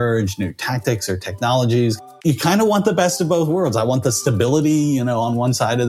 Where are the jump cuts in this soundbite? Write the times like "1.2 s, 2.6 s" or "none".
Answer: 2.0 s